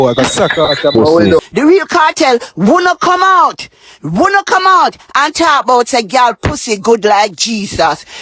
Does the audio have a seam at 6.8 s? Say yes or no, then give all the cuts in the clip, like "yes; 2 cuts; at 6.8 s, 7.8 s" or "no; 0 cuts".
no; 1 cut; at 1.4 s